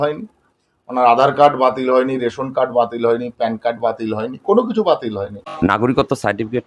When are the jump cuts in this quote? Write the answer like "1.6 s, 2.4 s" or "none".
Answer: 5.4 s